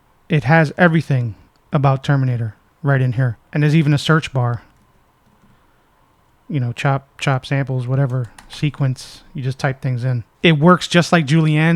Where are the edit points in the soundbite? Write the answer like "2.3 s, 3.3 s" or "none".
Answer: 10.2 s